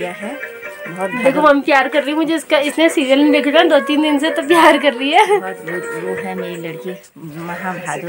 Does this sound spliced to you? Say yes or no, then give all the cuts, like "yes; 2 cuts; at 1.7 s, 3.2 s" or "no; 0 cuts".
no; 0 cuts